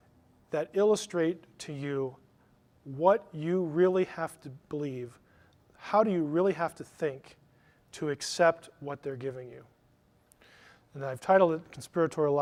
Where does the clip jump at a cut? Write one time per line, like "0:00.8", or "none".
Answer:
none